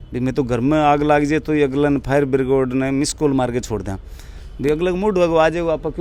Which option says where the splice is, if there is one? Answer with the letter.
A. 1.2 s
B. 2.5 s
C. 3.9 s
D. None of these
D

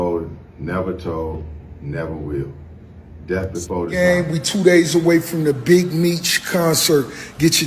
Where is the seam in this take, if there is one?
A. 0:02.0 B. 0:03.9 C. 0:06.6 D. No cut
B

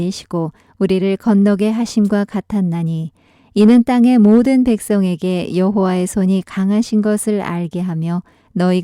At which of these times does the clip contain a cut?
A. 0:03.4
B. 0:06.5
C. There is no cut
A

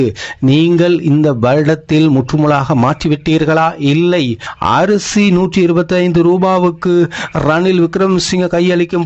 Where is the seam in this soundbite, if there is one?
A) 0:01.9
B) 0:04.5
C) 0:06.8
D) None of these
B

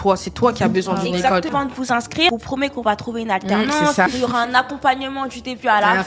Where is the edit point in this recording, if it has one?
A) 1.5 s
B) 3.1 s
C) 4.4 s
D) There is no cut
A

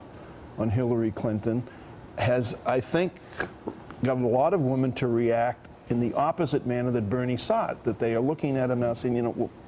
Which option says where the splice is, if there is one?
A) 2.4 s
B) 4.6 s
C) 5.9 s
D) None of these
D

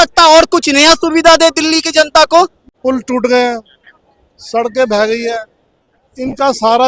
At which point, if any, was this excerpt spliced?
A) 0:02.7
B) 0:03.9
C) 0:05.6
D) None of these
A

